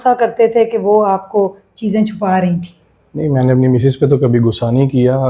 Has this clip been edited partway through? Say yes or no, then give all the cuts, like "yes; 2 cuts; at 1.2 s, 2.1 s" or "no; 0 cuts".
no; 0 cuts